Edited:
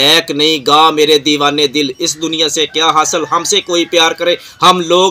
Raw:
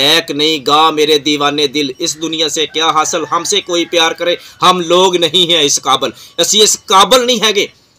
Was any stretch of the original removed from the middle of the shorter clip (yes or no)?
no